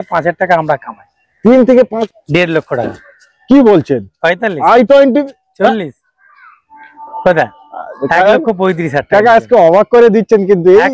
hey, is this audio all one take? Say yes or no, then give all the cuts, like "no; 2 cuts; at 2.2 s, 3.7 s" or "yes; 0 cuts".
no; 1 cut; at 2.0 s